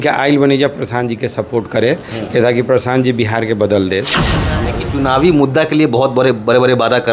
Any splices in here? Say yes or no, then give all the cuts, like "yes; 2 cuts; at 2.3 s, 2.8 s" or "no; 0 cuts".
yes; 1 cut; at 4.4 s